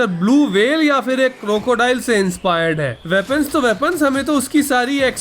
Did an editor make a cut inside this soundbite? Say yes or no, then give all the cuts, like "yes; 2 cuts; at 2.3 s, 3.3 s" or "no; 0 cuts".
yes; 1 cut; at 3.0 s